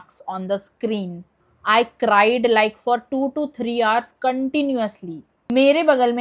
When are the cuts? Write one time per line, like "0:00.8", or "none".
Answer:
0:01.2
0:05.4